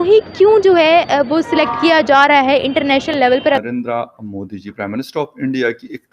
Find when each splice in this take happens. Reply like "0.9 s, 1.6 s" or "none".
3.6 s